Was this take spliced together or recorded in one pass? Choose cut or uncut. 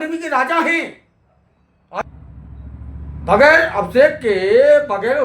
cut